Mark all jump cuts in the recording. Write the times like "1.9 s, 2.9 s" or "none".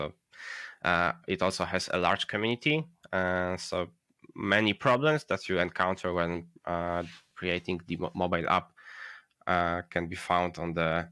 none